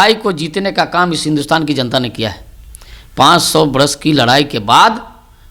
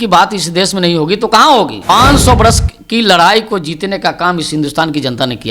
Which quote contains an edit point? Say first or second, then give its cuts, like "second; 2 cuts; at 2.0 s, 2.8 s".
second; 1 cut; at 1.9 s